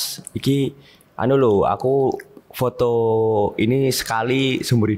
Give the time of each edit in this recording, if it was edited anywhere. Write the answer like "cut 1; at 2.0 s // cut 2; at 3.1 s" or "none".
none